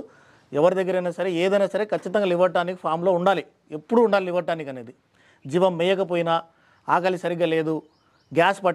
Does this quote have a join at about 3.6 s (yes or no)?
no